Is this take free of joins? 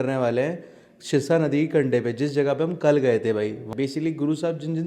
no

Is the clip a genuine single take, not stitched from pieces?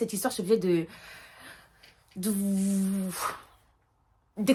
yes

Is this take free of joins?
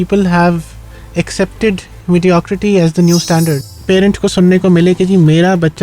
no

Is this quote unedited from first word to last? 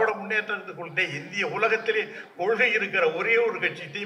yes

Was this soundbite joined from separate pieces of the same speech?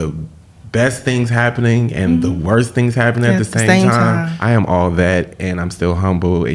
yes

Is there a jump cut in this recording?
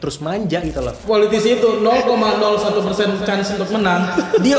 yes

